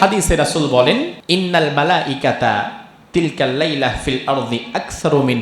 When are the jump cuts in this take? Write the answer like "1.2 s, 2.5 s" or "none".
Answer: 1.2 s